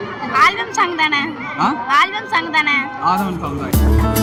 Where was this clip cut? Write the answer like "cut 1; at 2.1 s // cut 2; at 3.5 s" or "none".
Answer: none